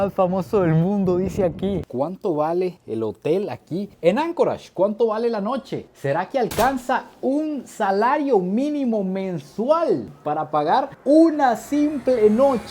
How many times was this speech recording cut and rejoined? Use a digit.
1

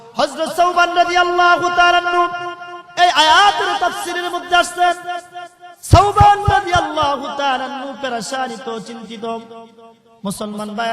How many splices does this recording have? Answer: 0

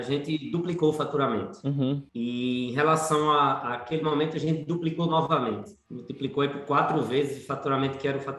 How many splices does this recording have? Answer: 0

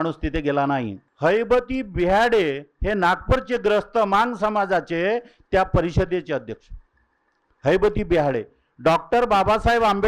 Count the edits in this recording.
1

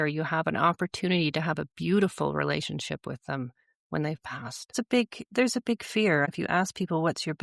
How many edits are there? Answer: 2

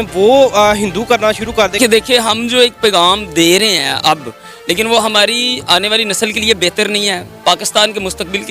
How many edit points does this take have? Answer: 1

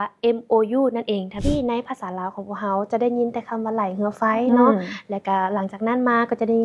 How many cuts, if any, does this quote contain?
1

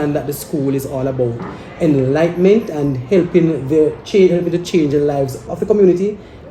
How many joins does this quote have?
1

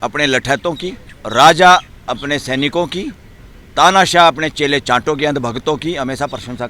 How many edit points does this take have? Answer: 1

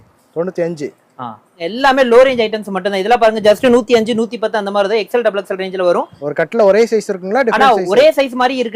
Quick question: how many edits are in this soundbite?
2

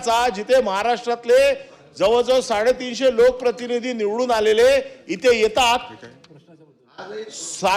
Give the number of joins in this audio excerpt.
0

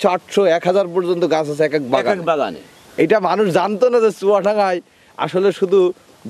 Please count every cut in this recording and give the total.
0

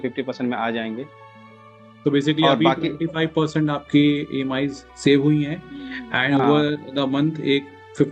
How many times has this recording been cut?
0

